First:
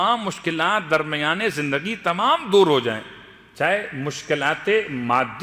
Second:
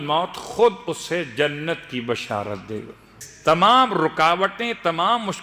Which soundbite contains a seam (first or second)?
second